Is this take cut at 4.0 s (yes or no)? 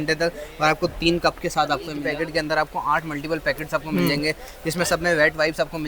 no